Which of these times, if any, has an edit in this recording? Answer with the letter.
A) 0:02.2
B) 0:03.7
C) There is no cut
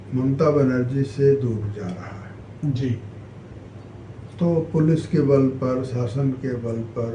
C